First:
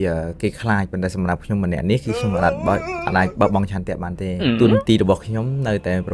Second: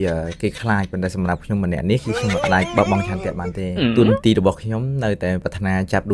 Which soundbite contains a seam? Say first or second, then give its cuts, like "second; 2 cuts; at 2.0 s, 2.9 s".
second; 2 cuts; at 2.4 s, 5.4 s